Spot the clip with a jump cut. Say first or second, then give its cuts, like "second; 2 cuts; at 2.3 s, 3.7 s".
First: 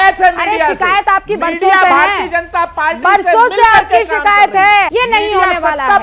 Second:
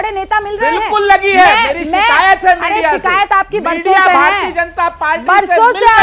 first; 1 cut; at 4.9 s